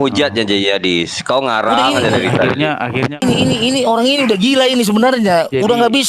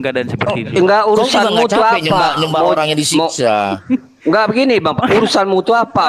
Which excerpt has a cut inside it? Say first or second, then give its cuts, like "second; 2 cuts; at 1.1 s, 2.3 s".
first; 1 cut; at 3.2 s